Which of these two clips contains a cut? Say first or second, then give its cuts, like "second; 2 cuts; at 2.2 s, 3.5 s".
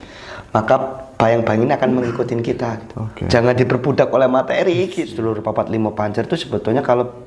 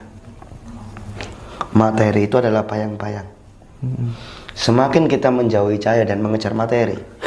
first; 1 cut; at 5.1 s